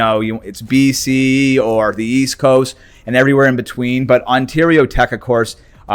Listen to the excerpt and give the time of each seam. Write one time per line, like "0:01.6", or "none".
none